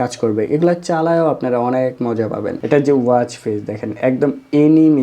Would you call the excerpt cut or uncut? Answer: cut